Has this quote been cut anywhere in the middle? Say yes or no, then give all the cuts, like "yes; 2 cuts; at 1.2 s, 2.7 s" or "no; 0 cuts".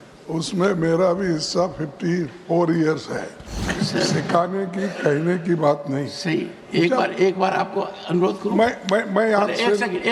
yes; 1 cut; at 3.7 s